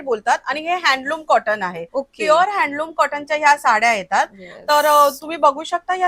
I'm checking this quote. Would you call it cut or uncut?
uncut